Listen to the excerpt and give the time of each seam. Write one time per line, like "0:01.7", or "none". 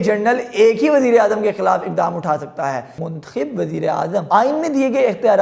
0:03.0
0:04.3